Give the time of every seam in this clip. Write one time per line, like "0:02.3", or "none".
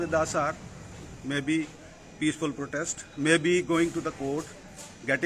none